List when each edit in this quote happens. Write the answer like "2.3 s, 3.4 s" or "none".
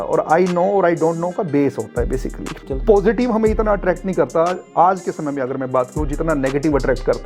2.6 s